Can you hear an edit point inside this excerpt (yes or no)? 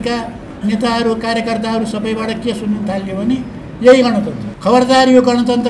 yes